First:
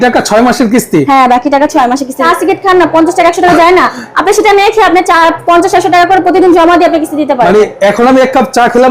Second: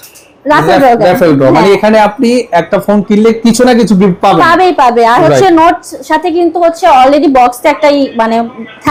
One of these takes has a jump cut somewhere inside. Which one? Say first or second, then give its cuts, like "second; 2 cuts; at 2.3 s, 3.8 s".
first; 1 cut; at 2.2 s